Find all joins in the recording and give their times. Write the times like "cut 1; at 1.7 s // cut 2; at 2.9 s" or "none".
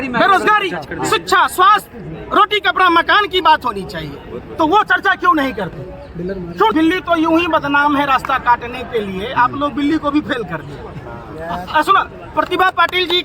cut 1; at 6.7 s